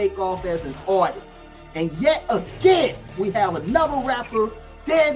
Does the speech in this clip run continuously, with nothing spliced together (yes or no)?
no